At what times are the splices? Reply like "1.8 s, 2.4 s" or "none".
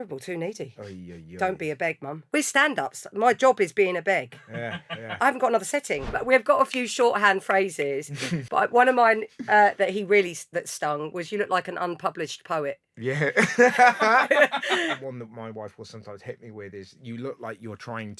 2.2 s, 5.2 s, 6.2 s, 8.3 s, 14.9 s